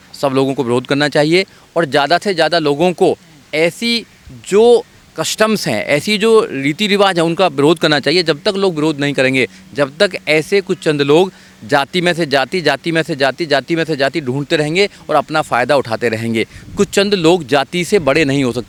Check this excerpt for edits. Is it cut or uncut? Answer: uncut